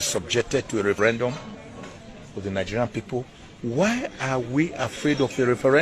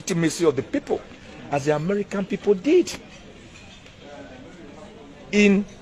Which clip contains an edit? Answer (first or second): first